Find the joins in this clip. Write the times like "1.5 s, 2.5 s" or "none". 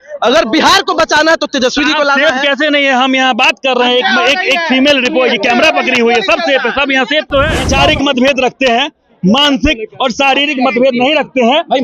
7.6 s